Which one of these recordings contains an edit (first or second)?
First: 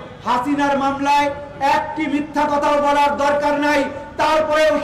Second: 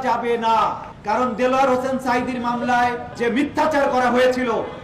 second